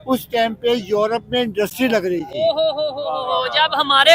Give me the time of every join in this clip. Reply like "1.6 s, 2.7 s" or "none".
none